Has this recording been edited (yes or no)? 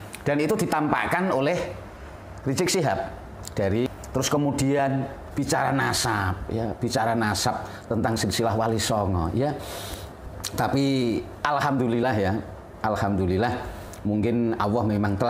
yes